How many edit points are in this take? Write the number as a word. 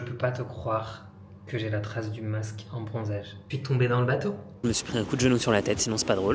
two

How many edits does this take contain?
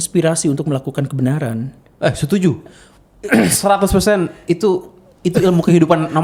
zero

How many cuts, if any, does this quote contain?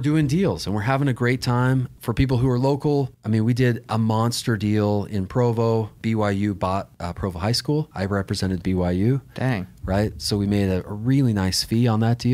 five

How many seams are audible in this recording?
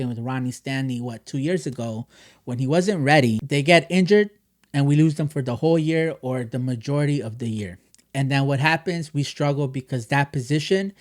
one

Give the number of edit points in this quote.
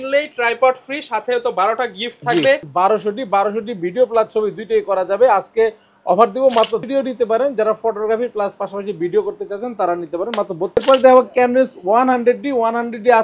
three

